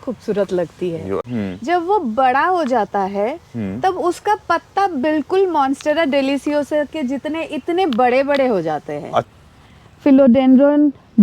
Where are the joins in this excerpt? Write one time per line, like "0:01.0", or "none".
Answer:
0:01.2
0:09.3